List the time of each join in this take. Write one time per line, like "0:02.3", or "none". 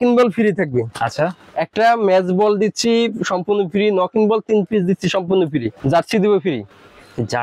0:05.8